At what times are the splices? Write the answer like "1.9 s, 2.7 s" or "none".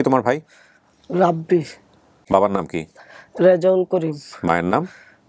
2.2 s